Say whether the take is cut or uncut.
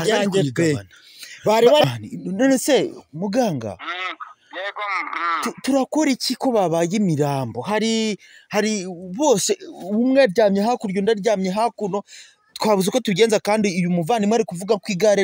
cut